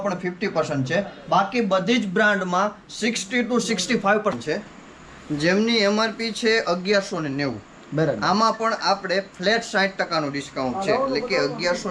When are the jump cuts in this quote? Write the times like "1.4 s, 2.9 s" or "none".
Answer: 4.3 s